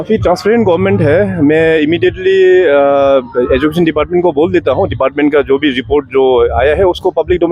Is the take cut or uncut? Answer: uncut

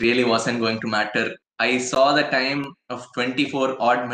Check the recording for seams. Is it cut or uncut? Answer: cut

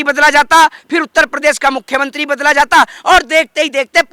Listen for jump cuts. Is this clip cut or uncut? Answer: uncut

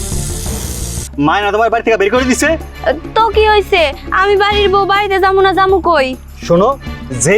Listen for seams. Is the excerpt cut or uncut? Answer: cut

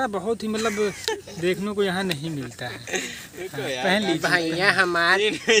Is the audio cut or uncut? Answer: uncut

